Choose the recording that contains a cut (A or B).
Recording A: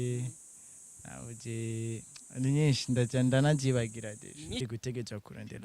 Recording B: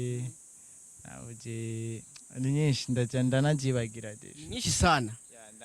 A